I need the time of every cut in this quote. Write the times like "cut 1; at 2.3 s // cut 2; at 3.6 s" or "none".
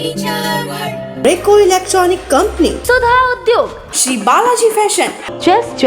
cut 1; at 1.1 s